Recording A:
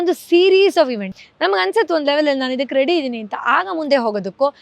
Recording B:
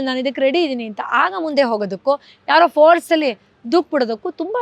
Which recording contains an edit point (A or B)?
A